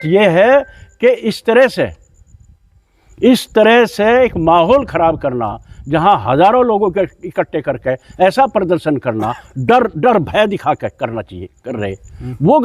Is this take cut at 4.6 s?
no; 0 cuts

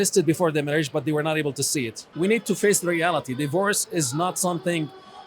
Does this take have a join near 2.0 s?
yes; 1 cut; at 2.0 s

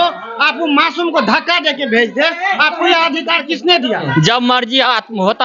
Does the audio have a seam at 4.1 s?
yes; 1 cut; at 4.1 s

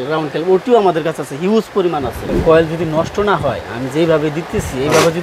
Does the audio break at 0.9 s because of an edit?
no; 1 cut; at 2.3 s

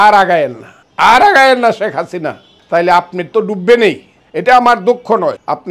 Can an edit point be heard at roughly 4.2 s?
no; 0 cuts

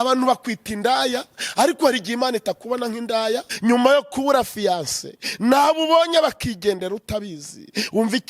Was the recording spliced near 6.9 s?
no; 1 cut; at 3.5 s

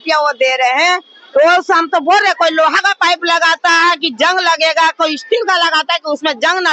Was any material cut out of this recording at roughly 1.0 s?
no; 0 cuts

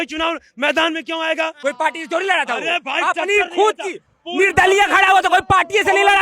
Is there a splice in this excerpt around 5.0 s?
no; 1 cut; at 1.6 s

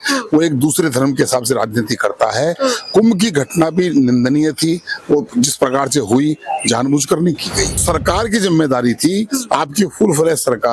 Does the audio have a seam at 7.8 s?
yes; 1 cut; at 7.8 s

